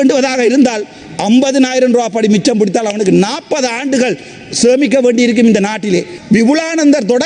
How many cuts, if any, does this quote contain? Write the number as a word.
one